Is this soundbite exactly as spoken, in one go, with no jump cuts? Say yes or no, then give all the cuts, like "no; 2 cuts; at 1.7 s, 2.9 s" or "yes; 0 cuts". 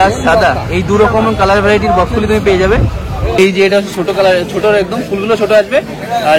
no; 1 cut; at 3.4 s